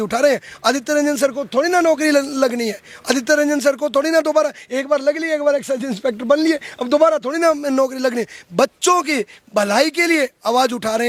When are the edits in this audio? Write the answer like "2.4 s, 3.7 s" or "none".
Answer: none